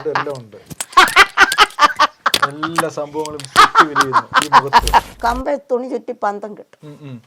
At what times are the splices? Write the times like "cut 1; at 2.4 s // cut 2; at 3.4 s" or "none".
cut 1; at 5.1 s